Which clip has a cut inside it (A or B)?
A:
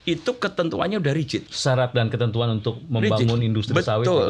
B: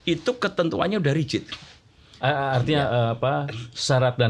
A